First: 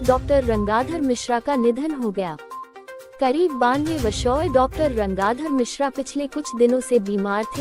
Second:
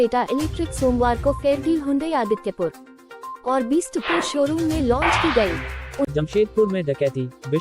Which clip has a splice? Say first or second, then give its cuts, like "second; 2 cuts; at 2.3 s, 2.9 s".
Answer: second; 1 cut; at 6.0 s